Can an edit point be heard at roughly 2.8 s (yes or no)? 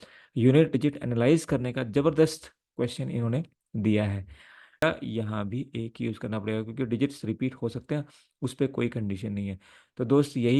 no